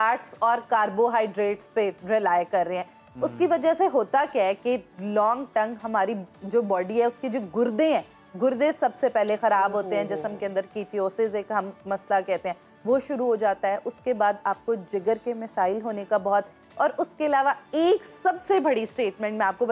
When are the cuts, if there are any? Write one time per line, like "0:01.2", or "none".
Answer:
none